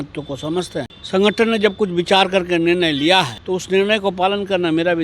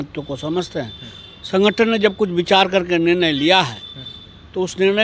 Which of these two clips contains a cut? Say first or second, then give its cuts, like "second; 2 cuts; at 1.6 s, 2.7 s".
first; 2 cuts; at 1.0 s, 3.4 s